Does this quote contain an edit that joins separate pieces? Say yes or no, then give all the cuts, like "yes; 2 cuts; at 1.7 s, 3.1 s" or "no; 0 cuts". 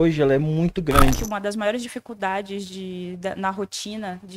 yes; 1 cut; at 1.3 s